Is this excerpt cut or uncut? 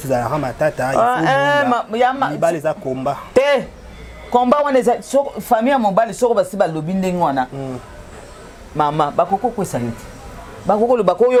uncut